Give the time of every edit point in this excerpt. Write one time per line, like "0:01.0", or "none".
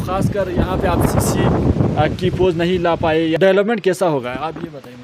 0:03.4